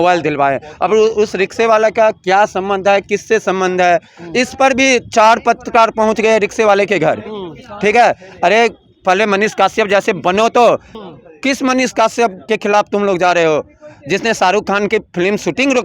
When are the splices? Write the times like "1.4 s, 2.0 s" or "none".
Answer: none